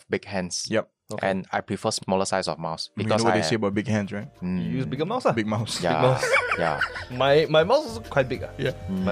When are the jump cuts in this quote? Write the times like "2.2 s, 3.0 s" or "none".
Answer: 8.0 s